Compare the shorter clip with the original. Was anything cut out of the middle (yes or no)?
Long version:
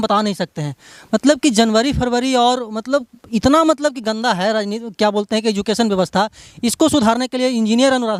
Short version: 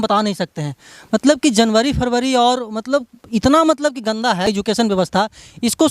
yes